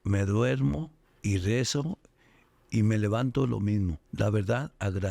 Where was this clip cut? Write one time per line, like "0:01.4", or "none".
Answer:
0:01.0
0:04.0